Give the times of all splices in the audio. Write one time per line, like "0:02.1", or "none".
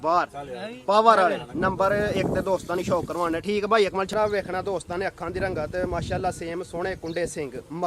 0:04.1